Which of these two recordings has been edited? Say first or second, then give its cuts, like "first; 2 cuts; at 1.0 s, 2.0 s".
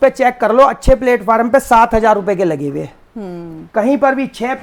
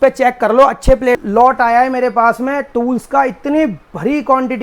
second; 1 cut; at 1.2 s